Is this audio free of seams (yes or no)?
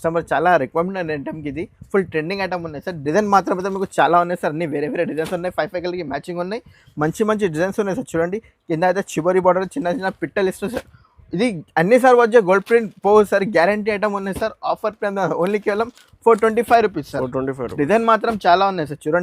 yes